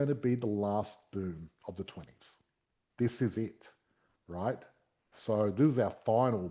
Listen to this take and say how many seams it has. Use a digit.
0